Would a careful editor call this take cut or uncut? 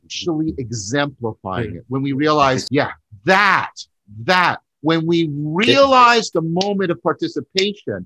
cut